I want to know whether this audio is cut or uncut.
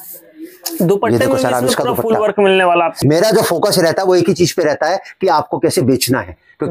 cut